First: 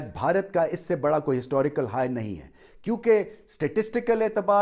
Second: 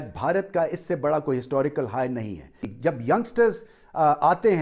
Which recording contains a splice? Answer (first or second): second